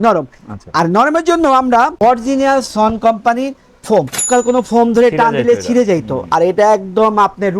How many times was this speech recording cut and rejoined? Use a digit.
2